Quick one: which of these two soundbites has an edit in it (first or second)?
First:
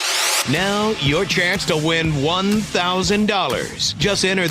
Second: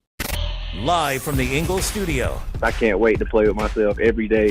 first